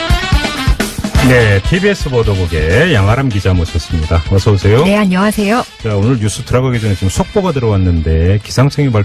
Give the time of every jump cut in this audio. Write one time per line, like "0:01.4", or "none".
none